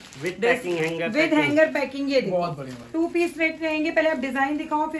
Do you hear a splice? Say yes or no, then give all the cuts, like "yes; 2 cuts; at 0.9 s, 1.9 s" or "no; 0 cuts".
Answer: no; 0 cuts